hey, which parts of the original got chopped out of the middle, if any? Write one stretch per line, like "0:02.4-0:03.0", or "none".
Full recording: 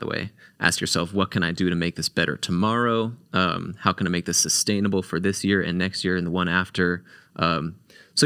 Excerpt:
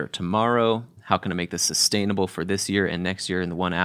0:03.2-0:03.7

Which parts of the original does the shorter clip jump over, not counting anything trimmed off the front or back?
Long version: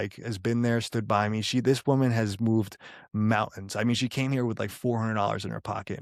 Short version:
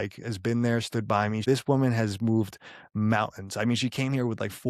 0:01.4-0:01.6

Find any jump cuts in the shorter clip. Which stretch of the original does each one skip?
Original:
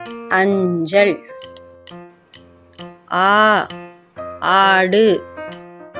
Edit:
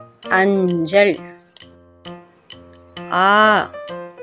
none

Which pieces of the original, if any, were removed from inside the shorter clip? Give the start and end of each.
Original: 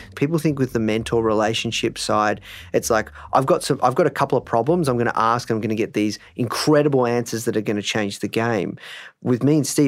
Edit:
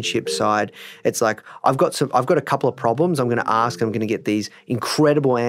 none

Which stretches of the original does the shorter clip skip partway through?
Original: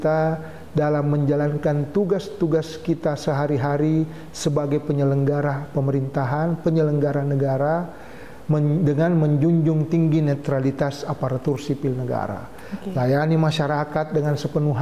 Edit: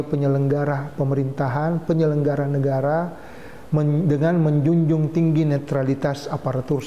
none

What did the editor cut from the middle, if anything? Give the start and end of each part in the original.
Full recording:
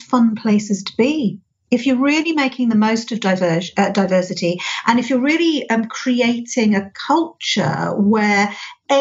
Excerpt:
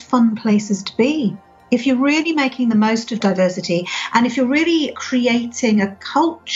0:03.2-0:03.9
0:05.7-0:05.9

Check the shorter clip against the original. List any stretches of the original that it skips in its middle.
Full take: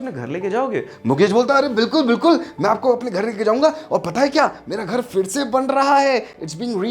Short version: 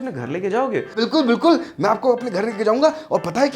0:00.9-0:01.7

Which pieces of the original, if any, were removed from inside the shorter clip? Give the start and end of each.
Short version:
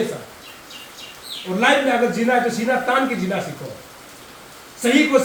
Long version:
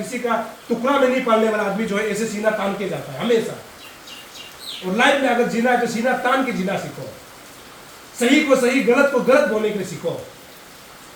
none

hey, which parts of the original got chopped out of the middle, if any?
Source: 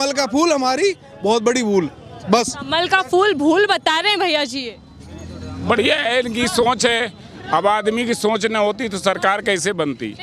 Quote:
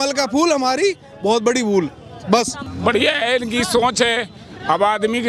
0:02.6-0:05.4

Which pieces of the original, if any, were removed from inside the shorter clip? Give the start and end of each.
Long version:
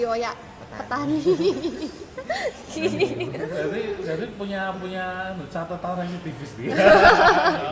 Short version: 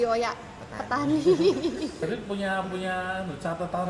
0:02.0-0:04.1

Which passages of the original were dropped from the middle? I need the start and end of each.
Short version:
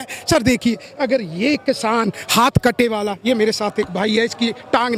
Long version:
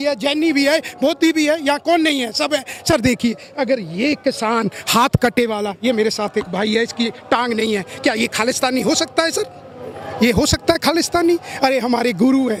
none

